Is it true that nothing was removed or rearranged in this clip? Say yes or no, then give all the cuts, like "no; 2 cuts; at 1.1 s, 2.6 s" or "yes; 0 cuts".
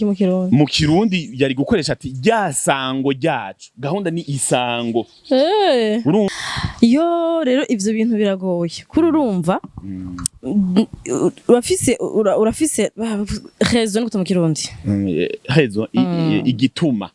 no; 1 cut; at 6.5 s